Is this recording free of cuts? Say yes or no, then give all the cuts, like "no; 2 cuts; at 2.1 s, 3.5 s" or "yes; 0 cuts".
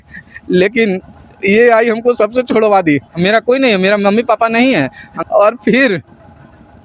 no; 2 cuts; at 3.1 s, 5.1 s